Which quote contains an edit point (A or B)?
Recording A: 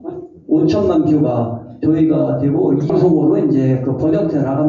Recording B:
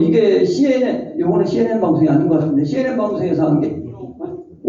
A